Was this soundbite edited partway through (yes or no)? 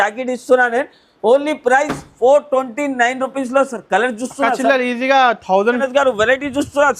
yes